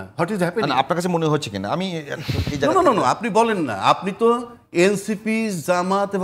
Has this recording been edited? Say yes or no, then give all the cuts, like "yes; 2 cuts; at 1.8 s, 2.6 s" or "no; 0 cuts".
no; 0 cuts